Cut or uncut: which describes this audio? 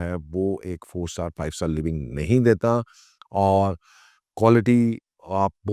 uncut